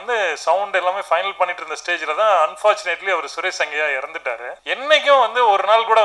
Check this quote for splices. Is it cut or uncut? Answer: cut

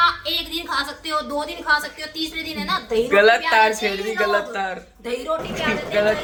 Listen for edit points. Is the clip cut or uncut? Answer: uncut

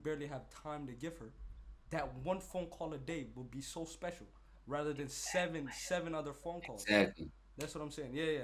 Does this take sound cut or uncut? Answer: uncut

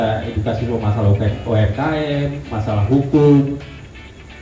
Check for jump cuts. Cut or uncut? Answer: uncut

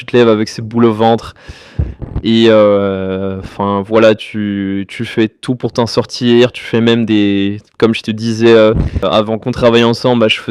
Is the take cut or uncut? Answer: cut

